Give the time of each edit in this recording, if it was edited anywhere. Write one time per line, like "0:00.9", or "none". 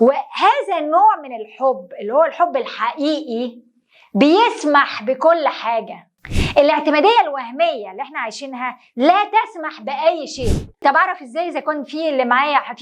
0:10.8